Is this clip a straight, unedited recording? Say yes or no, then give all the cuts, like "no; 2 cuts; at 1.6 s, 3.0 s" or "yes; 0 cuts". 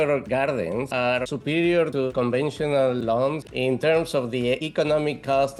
no; 3 cuts; at 2.1 s, 3.4 s, 4.7 s